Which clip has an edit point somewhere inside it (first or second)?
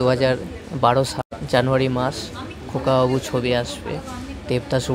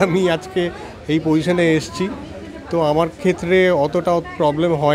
first